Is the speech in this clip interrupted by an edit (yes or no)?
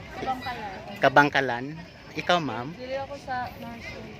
no